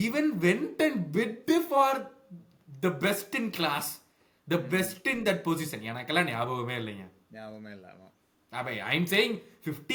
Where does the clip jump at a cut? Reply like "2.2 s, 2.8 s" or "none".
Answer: none